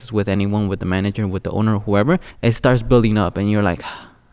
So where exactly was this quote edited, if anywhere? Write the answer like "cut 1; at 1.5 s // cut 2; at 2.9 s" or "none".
cut 1; at 2.3 s